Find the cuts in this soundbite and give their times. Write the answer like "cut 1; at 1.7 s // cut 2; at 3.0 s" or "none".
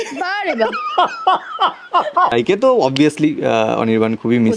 cut 1; at 2.3 s